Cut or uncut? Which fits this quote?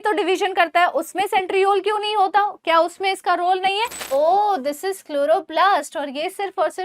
cut